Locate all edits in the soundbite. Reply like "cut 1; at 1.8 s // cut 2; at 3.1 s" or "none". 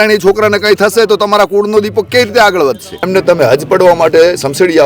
cut 1; at 3.1 s